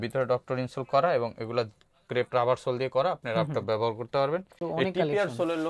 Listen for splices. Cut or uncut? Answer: cut